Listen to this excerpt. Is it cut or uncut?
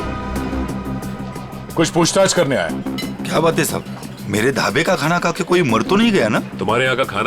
uncut